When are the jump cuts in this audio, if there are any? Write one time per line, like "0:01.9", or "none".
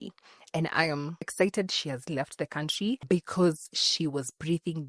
0:01.3
0:03.0